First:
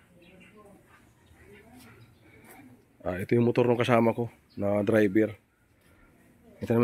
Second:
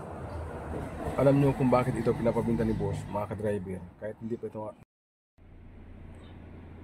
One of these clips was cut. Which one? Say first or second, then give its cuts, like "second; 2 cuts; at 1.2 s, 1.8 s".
second; 1 cut; at 4.8 s